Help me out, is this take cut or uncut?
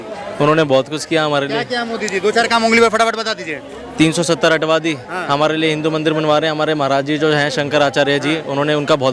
uncut